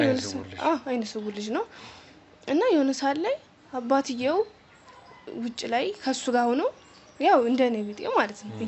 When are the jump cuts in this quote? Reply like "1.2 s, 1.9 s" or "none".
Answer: none